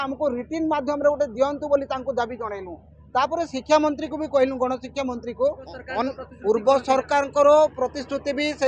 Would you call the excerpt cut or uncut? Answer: cut